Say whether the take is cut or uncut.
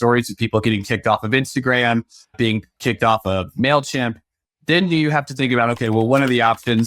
cut